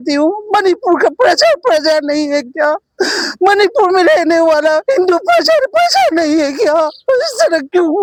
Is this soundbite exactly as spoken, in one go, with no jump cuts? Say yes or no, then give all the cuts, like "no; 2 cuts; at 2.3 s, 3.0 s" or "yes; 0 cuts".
yes; 0 cuts